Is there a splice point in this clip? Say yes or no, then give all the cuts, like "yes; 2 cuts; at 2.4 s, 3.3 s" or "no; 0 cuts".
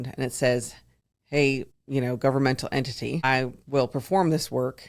yes; 2 cuts; at 1.7 s, 3.2 s